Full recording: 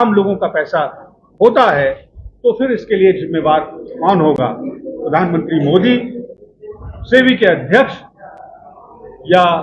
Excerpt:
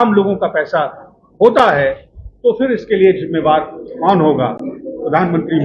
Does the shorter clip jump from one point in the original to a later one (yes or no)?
no